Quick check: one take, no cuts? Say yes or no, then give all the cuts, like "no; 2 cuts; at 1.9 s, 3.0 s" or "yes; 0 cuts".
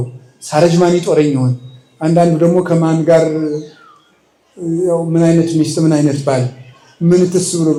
yes; 0 cuts